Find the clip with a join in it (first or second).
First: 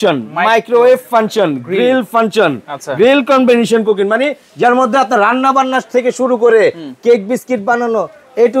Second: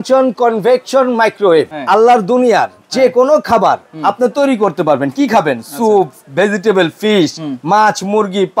second